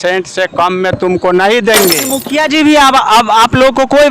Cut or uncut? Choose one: cut